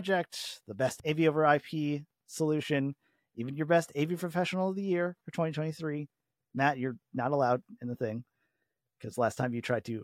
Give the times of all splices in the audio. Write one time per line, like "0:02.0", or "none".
0:01.0